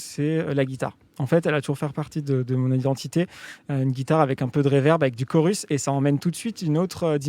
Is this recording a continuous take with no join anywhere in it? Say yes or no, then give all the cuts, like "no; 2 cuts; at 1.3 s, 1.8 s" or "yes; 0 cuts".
yes; 0 cuts